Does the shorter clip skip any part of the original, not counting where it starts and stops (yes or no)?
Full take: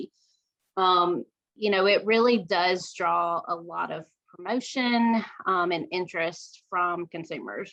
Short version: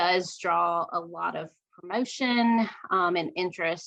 no